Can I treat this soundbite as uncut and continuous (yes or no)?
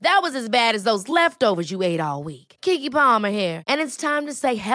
yes